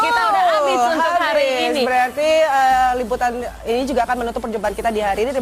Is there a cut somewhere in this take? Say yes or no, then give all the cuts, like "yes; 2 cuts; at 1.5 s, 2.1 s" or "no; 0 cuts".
yes; 1 cut; at 4.3 s